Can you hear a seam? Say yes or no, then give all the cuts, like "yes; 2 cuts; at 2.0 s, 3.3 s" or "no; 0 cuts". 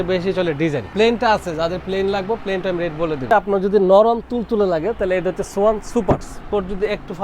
yes; 3 cuts; at 0.9 s, 3.3 s, 6.3 s